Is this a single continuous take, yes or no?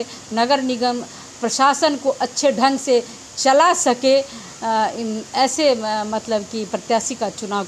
yes